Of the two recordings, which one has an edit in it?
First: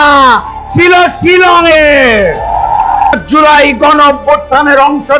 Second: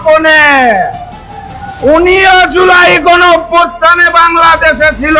first; 1 cut; at 3.1 s

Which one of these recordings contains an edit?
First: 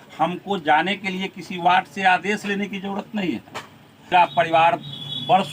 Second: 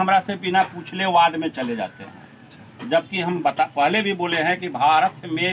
first; 1 cut; at 4.1 s

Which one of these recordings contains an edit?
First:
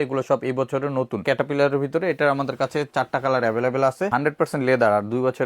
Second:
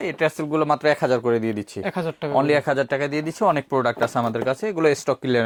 first; 2 cuts; at 1.2 s, 4.1 s

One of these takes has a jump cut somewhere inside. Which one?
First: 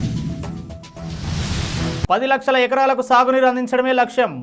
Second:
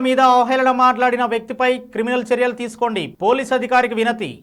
first; 1 cut; at 2.0 s

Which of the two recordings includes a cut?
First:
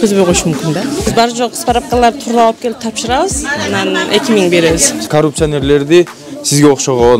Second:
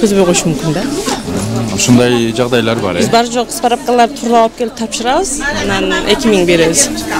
first; 2 cuts; at 1.1 s, 5.1 s

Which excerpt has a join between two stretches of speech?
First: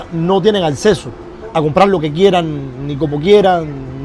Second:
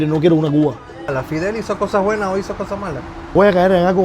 second; 2 cuts; at 1.1 s, 3.2 s

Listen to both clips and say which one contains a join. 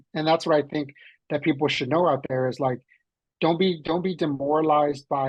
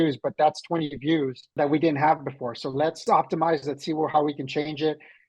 second; 2 cuts; at 1.4 s, 3.0 s

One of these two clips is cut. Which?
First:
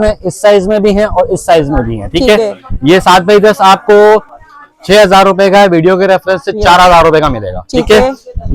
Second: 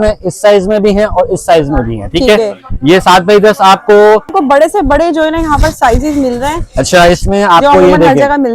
second; 1 cut; at 4.3 s

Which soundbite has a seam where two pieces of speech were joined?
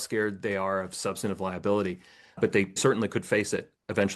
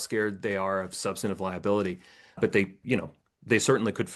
first; 1 cut; at 2.8 s

